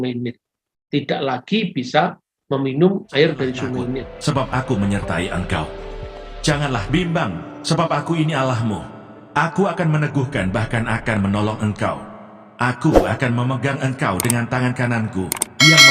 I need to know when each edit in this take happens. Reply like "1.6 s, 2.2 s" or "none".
4.1 s